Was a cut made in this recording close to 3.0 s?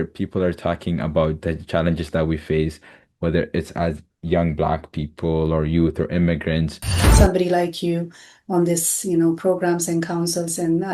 no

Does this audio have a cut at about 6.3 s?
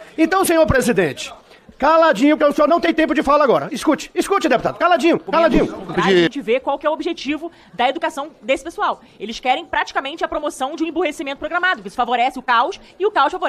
yes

